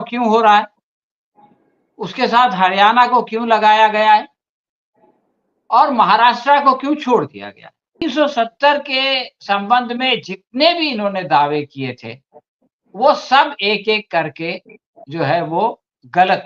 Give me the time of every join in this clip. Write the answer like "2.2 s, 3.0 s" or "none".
8.0 s